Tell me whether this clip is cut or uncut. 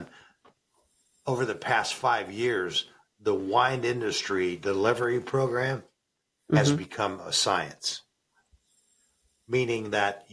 uncut